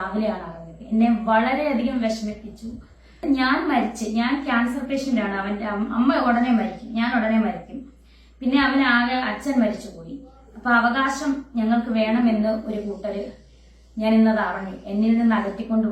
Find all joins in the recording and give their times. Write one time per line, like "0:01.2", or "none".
0:03.2

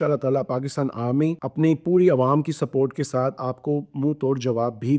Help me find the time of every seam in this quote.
none

